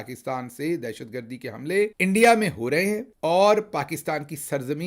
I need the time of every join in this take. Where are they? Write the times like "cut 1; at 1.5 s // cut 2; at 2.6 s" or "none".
cut 1; at 1.9 s